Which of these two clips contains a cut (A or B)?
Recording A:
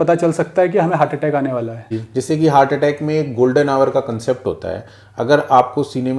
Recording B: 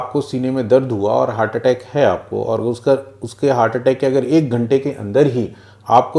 A